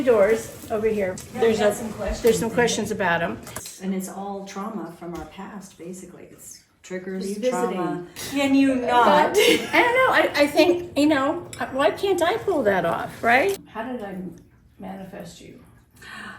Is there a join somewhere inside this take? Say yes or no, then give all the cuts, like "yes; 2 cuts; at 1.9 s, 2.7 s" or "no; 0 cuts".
yes; 4 cuts; at 1.2 s, 3.7 s, 8.2 s, 13.7 s